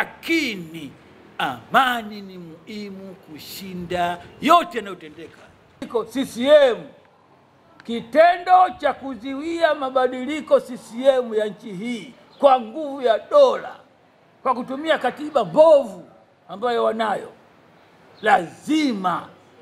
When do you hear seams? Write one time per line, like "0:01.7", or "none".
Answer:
0:05.8